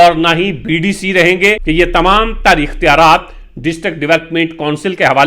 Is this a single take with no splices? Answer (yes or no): no